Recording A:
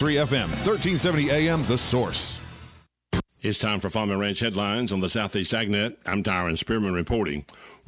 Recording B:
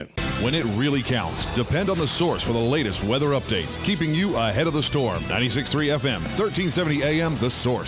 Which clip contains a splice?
A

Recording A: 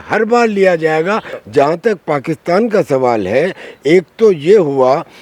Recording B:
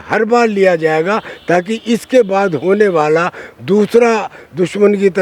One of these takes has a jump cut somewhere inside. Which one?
A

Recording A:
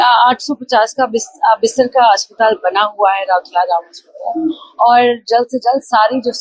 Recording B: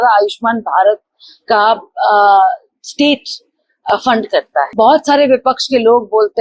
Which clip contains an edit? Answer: B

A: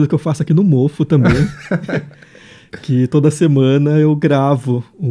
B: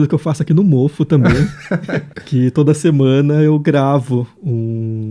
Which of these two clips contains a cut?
B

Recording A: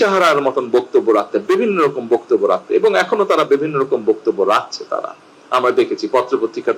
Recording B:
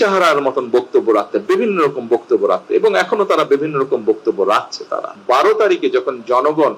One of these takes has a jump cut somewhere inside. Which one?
B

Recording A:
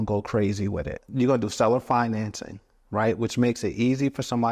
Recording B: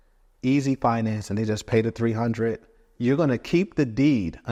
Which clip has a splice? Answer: A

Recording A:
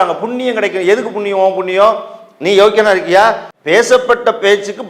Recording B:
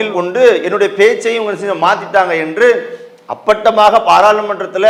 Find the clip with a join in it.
A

